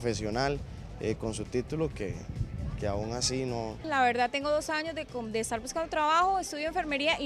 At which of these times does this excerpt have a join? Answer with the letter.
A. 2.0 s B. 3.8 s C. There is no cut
B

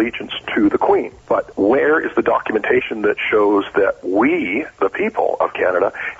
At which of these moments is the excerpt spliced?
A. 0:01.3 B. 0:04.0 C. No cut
A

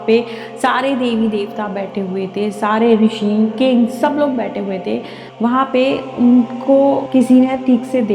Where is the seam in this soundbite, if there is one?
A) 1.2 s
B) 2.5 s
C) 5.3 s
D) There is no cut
C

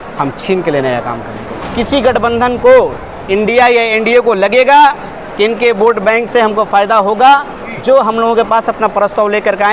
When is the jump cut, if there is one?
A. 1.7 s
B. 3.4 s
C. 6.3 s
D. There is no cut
A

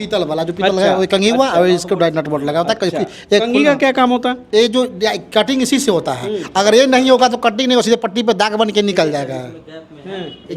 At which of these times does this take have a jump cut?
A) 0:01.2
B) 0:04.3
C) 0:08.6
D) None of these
D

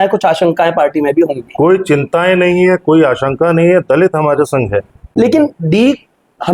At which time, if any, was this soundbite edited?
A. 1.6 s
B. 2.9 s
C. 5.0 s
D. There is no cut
C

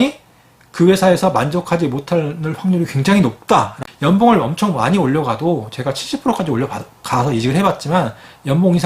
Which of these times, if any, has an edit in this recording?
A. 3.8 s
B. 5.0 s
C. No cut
A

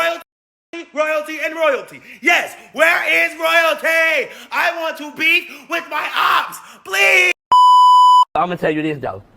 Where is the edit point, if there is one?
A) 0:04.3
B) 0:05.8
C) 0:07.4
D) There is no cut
C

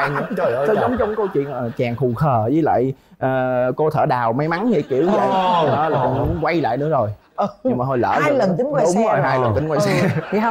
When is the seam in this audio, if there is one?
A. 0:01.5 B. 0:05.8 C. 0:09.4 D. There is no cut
D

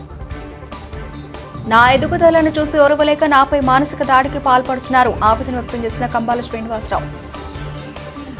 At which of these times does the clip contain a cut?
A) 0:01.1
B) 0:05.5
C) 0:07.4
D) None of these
A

